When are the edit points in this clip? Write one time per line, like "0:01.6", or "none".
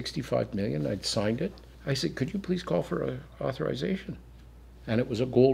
0:01.7